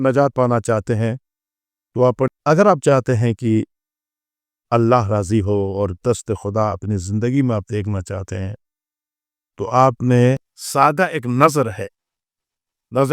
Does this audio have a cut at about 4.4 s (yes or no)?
no